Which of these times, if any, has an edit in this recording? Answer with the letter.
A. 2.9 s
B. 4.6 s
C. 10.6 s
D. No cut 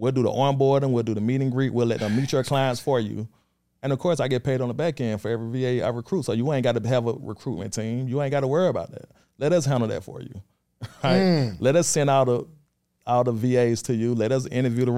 D